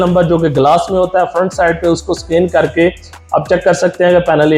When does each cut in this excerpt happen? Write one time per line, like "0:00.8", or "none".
none